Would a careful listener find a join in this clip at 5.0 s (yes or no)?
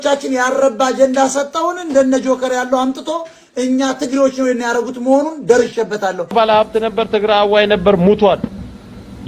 no